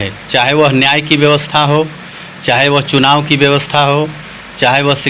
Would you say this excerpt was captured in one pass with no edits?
yes; 0 cuts

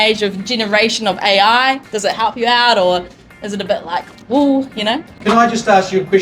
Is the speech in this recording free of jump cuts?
no; 1 cut; at 5.1 s

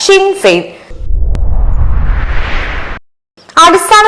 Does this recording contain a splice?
yes; 2 cuts; at 1.0 s, 3.1 s

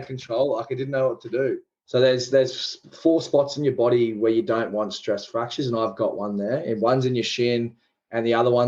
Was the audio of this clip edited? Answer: yes; 1 cut; at 1.7 s

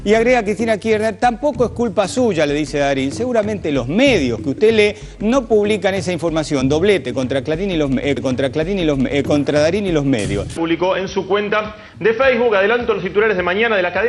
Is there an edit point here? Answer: no; 0 cuts

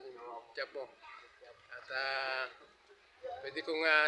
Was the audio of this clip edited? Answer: no; 0 cuts

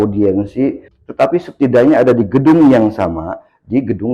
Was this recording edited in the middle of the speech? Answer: yes; 1 cut; at 0.9 s

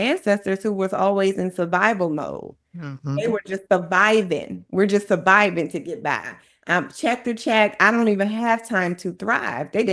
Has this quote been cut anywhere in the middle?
no; 0 cuts

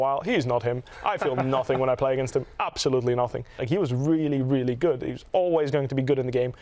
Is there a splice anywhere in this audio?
yes; 1 cut; at 3.6 s

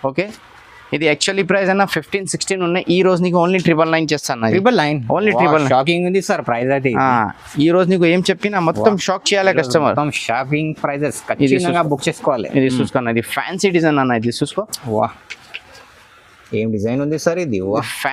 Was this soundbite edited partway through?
no; 0 cuts

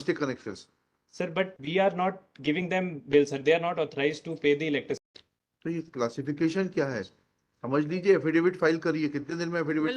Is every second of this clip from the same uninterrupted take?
no; 1 cut; at 5.0 s

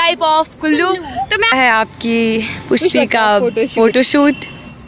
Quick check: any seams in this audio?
yes; 1 cut; at 1.5 s

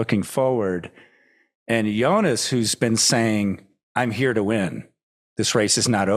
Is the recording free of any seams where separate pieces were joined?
yes; 0 cuts

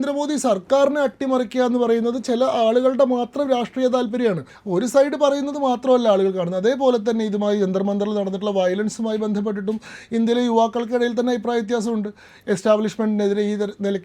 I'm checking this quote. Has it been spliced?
yes; 1 cut; at 4.5 s

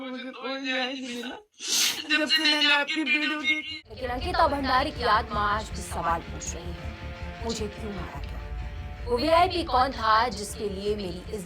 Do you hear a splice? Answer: yes; 1 cut; at 3.7 s

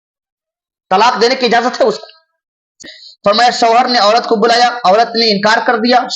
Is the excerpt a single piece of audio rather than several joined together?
no; 1 cut; at 2.8 s

